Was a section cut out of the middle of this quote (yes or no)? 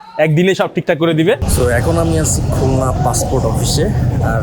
yes